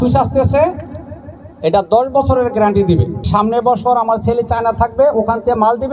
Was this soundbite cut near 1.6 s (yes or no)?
no